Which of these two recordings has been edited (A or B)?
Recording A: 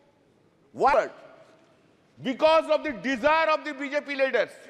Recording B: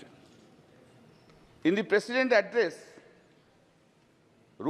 A